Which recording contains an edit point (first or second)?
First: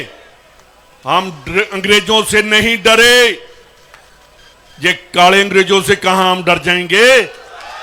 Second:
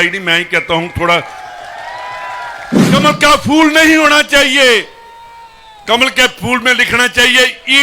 second